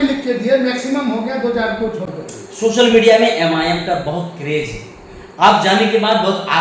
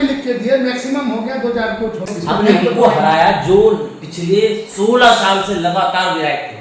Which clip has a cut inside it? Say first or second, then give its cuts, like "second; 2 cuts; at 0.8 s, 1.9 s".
second; 1 cut; at 2.1 s